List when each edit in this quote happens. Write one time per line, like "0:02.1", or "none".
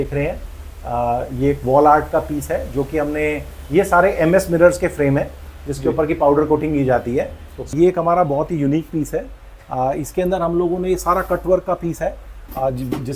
0:07.7